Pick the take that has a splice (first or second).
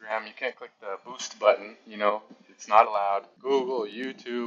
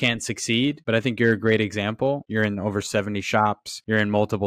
second